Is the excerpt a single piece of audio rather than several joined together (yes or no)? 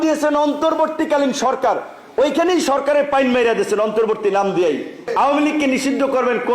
no